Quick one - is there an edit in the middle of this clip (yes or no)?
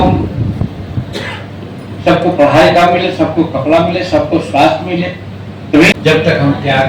yes